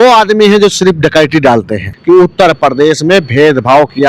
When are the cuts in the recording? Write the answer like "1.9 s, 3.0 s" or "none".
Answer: 1.9 s